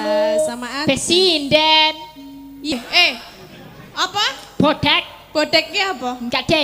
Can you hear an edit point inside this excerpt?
yes; 1 cut; at 2.7 s

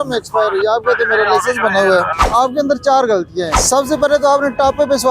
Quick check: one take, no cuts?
no; 2 cuts; at 2.1 s, 3.6 s

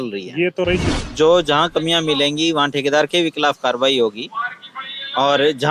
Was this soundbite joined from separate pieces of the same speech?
yes; 1 cut; at 0.9 s

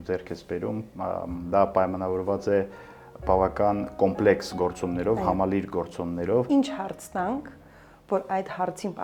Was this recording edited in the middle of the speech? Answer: yes; 1 cut; at 6.5 s

